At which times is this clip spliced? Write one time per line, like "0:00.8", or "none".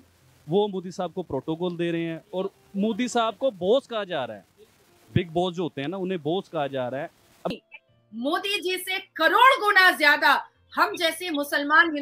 0:07.5